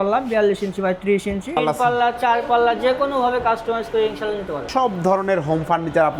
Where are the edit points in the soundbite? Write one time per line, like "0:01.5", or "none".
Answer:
0:01.6
0:04.7